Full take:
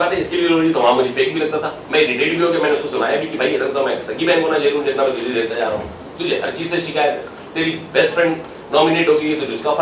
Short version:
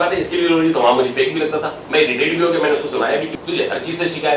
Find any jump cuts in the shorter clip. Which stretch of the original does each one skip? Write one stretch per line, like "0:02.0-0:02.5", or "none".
0:03.3-0:06.0

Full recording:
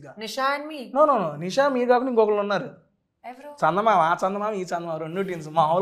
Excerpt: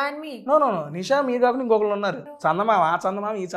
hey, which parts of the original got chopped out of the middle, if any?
0:02.7-0:03.4

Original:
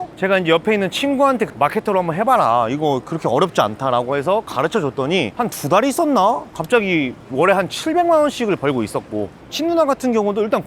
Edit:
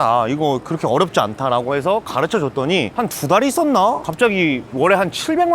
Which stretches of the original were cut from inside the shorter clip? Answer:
0:06.7-0:06.8

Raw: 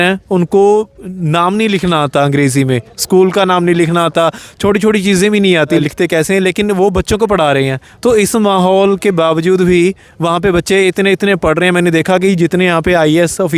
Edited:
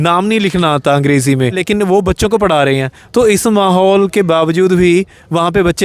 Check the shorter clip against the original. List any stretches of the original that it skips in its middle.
0:02.9-0:06.5

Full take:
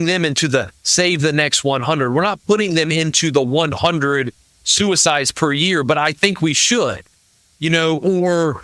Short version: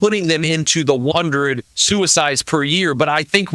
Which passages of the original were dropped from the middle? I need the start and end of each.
0:03.8-0:04.2

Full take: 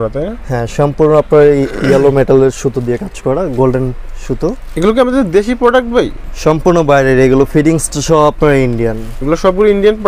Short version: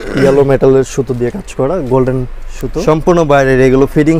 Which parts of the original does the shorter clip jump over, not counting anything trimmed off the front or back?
0:04.3-0:06.2

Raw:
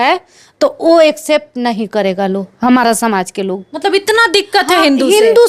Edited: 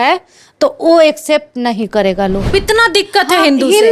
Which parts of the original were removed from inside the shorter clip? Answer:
0:02.5-0:03.9

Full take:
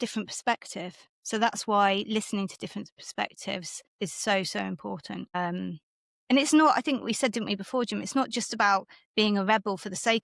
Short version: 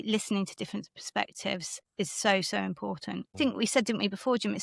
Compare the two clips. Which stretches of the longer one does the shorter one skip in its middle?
0:05.4-0:06.8

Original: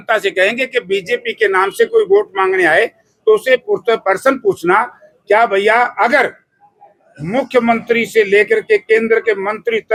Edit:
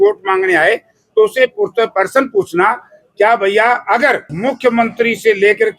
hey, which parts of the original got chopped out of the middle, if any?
0:06.4-0:07.2

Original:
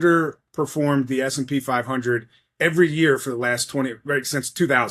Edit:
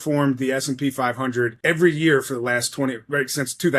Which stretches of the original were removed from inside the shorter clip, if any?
0:02.3-0:02.5

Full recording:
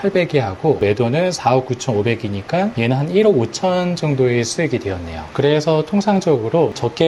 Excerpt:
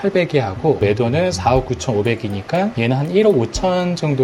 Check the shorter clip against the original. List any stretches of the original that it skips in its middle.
none

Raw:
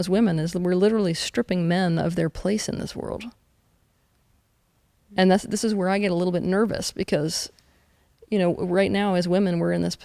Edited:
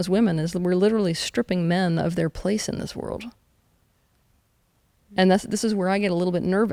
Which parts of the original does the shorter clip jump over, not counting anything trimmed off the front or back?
none

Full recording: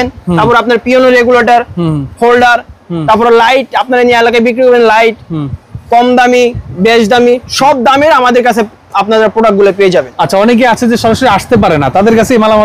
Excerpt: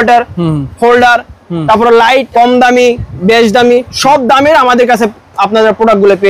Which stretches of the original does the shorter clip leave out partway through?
0:03.7-0:05.8

